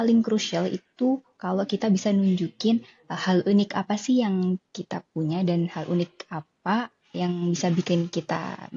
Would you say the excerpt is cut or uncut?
uncut